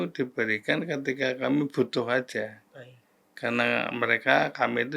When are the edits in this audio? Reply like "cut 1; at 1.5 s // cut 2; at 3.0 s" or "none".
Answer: none